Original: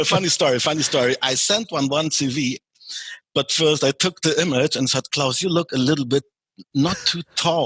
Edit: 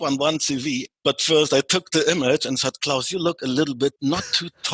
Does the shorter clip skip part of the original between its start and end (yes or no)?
yes